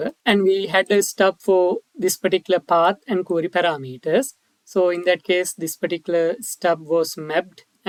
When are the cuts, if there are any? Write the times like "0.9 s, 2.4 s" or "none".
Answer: none